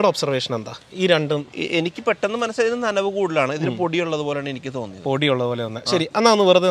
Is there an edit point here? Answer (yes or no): no